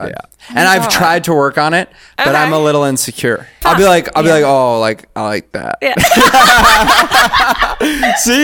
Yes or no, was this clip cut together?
yes